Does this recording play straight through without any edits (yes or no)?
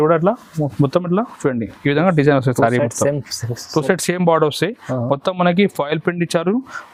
yes